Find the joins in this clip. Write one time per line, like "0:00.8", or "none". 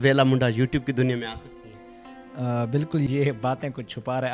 0:03.1